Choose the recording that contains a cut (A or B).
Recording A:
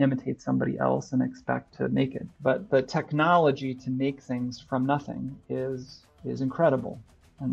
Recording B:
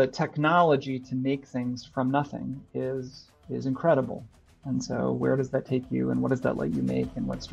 A